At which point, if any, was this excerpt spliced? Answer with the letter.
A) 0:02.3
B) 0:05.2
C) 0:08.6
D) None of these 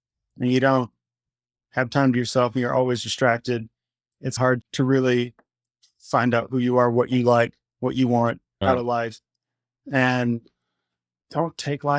C